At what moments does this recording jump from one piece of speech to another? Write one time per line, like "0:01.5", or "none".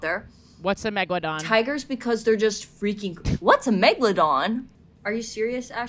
0:01.4
0:04.8